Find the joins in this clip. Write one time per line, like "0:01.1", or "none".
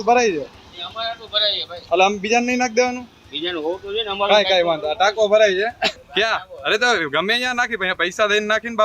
0:06.0